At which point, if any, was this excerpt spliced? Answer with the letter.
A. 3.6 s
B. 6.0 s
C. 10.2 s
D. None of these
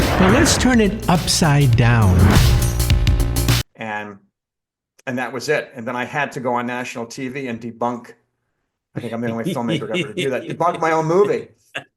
A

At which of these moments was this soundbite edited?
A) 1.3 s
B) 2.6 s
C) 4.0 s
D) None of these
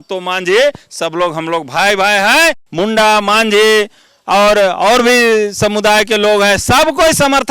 B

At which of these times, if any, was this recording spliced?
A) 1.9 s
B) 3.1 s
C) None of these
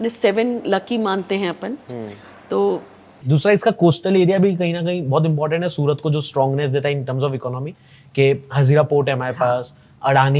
B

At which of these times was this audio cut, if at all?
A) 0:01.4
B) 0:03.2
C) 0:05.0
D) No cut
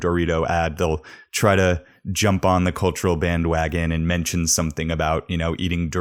D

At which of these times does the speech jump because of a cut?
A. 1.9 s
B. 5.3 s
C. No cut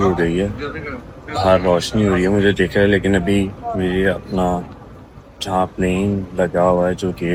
C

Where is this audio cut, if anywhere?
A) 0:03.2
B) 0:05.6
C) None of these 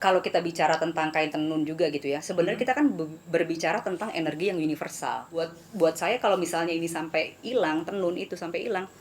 B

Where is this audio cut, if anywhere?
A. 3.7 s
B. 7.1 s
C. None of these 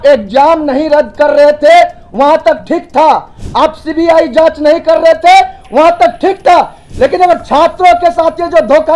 C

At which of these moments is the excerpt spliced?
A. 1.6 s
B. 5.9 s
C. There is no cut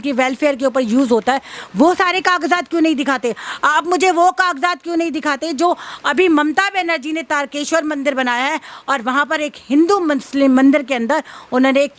C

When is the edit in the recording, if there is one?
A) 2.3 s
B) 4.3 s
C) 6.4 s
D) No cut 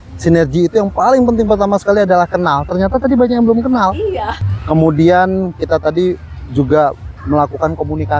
B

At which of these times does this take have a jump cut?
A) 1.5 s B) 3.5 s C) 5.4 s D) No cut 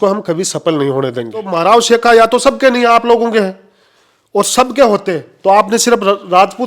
A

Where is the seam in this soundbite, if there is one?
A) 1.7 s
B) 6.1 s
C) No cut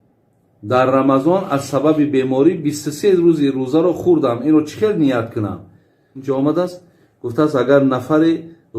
B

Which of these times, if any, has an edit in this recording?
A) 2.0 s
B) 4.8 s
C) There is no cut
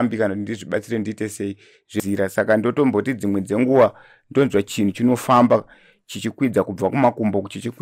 A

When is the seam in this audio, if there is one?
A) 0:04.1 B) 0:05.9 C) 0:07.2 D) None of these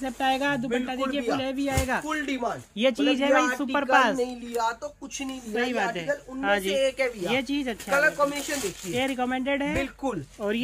D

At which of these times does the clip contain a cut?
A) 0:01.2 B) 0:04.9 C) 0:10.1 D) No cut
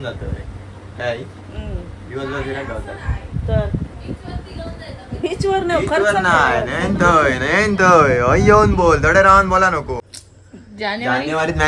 C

